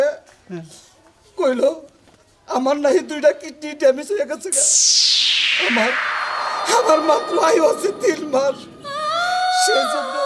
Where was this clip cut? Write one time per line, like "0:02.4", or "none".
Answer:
none